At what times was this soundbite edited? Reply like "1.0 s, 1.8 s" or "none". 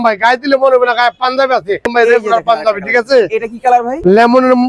1.9 s